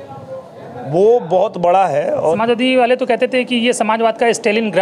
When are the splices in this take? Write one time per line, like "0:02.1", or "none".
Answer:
0:02.4